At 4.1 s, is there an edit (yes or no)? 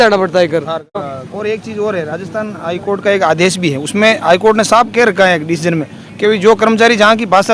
no